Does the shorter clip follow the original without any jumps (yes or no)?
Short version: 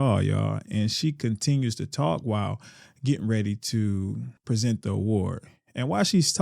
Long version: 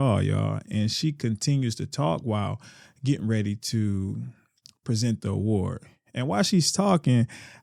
no